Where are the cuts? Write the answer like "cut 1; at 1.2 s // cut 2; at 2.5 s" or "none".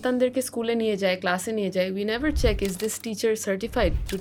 none